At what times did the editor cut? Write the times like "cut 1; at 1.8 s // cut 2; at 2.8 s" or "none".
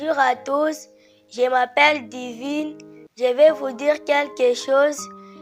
none